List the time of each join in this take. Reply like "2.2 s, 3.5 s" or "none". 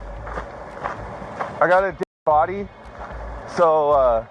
none